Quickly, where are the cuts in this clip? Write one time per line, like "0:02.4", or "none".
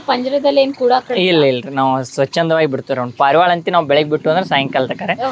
none